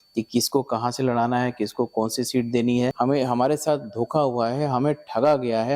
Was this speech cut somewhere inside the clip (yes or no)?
yes